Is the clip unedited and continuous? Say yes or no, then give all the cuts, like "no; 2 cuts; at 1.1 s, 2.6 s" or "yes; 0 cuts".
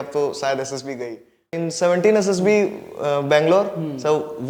no; 1 cut; at 1.6 s